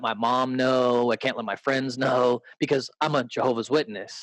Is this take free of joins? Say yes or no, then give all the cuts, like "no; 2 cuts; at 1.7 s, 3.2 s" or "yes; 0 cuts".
yes; 0 cuts